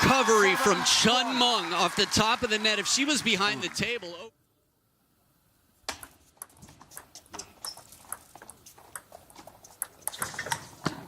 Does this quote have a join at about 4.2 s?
yes; 1 cut; at 4.2 s

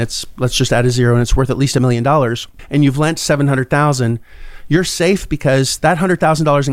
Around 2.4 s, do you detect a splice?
no; 0 cuts

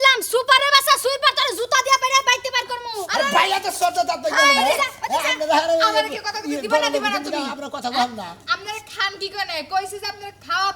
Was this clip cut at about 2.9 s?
no; 0 cuts

